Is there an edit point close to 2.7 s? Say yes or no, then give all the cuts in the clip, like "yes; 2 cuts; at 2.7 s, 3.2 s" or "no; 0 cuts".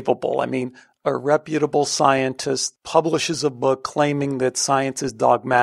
yes; 1 cut; at 2.7 s